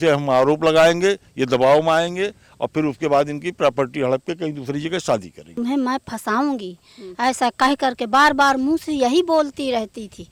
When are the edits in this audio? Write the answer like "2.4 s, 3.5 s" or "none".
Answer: 5.5 s